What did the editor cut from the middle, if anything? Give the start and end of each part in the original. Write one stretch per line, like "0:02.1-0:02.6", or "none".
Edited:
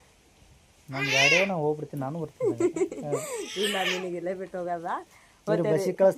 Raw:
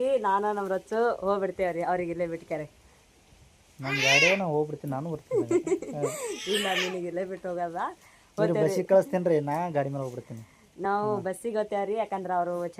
none